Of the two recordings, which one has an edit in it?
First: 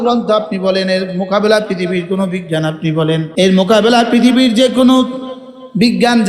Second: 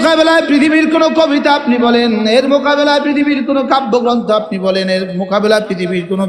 first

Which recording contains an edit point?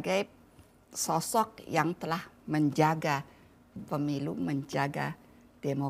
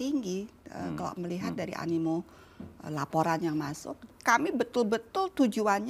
second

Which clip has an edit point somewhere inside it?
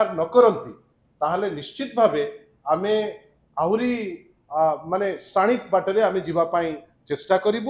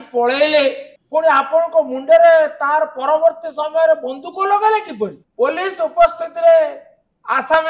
second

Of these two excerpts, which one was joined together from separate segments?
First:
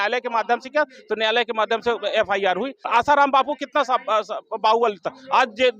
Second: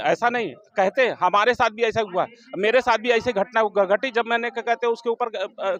first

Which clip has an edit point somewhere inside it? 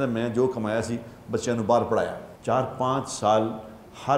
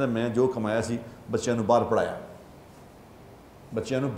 first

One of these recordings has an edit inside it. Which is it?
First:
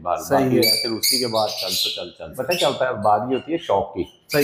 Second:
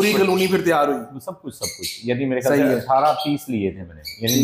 first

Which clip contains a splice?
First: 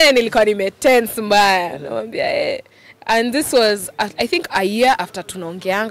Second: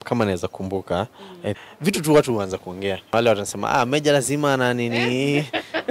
second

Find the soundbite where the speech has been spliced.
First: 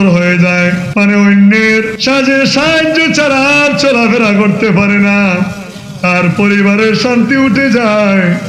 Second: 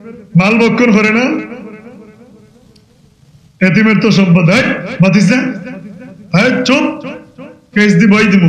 first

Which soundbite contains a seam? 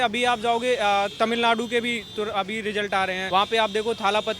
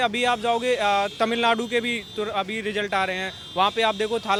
first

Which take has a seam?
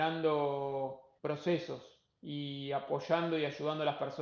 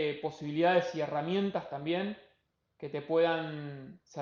first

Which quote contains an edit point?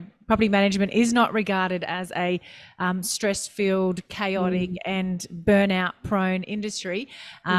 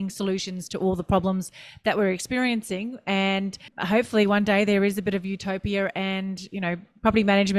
second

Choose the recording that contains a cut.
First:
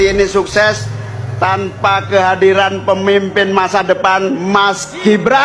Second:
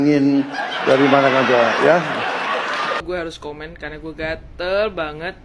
second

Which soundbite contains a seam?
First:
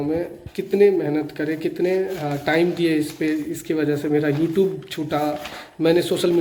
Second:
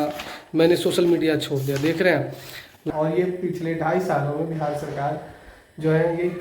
second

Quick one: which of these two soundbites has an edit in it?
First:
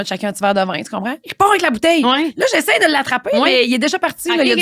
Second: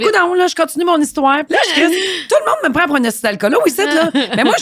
second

